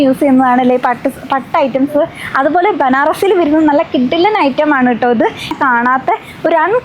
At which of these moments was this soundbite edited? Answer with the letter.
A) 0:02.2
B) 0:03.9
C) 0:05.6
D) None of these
C